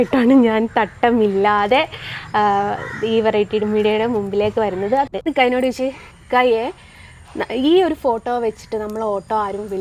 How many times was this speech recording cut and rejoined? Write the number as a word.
one